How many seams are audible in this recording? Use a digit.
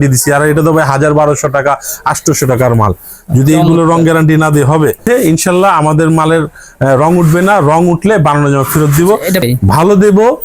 2